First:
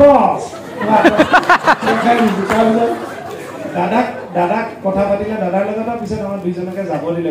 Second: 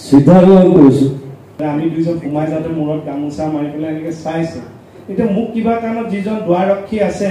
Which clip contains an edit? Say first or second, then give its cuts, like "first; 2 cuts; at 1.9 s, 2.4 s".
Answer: second; 1 cut; at 1.6 s